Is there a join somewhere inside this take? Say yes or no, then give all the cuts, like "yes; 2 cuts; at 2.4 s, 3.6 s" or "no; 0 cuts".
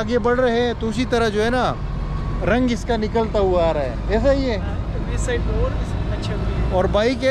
no; 0 cuts